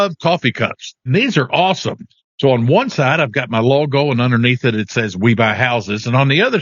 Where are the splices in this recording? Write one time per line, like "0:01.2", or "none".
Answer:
0:01.1